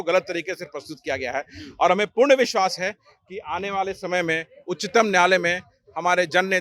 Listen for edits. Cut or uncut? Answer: uncut